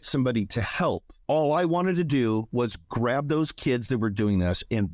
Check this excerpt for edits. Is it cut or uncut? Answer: cut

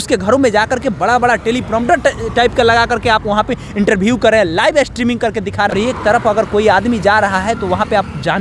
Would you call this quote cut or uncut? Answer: cut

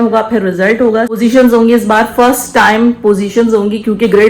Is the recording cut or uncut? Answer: cut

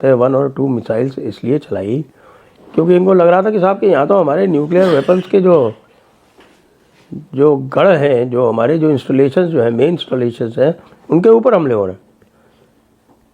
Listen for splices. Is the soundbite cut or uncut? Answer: uncut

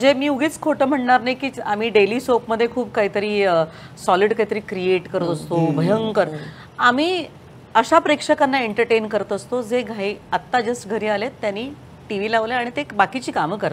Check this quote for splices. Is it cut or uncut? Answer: uncut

